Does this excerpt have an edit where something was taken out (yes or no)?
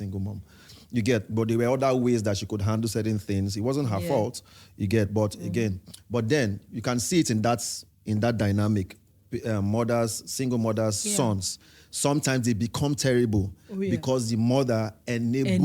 no